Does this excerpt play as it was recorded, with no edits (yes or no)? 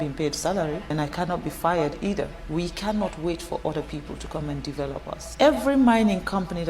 no